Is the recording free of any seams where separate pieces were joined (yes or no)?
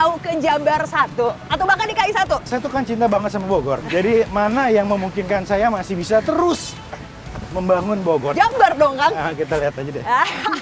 no